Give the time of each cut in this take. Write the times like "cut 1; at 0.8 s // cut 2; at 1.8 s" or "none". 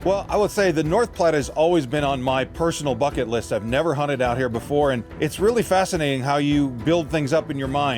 cut 1; at 5.1 s